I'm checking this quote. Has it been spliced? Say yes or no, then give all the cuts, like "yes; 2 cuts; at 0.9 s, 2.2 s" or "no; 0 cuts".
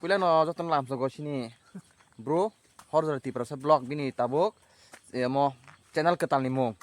yes; 1 cut; at 2.7 s